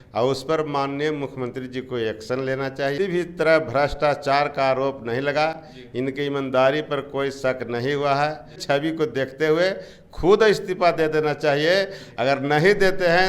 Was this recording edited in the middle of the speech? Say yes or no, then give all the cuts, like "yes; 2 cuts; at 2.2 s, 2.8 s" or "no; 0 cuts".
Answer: yes; 2 cuts; at 3.0 s, 8.5 s